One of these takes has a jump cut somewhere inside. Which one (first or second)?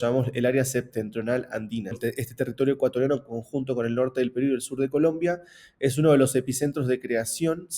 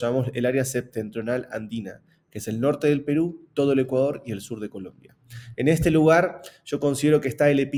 first